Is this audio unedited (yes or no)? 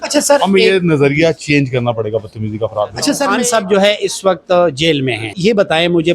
no